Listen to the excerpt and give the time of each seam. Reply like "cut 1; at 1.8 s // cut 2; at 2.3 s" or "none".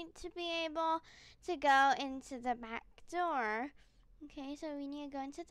none